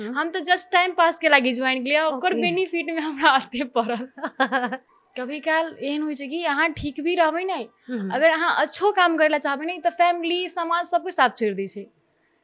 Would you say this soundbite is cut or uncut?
cut